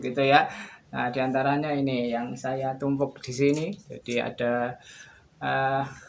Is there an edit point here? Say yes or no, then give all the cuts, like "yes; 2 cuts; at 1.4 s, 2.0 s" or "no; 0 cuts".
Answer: no; 0 cuts